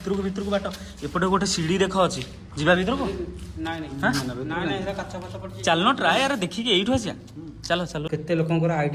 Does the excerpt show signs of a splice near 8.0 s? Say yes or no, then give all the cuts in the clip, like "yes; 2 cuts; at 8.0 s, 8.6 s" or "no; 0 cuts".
yes; 1 cut; at 8.0 s